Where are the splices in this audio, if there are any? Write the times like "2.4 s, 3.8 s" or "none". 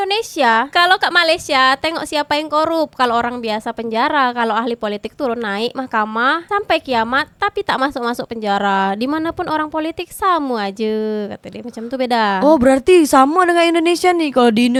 none